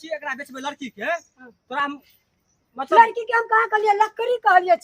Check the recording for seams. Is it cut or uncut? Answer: uncut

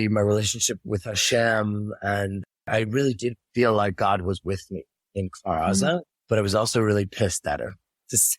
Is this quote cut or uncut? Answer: cut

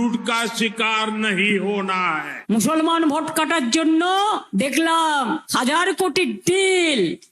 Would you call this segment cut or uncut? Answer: cut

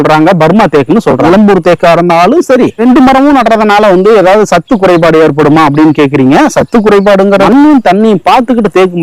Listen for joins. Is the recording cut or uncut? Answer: cut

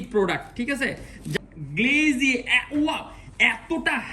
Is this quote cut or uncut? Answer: cut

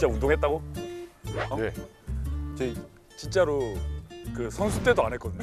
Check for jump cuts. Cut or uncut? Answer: uncut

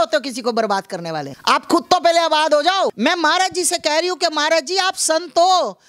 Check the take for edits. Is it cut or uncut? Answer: cut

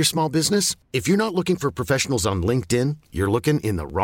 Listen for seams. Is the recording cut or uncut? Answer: uncut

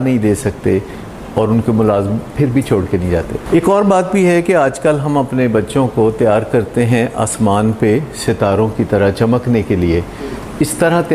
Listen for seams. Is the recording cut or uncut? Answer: cut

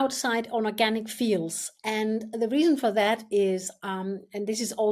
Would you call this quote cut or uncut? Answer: uncut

